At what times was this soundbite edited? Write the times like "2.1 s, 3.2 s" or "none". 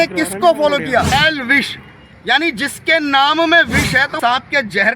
1.1 s, 4.2 s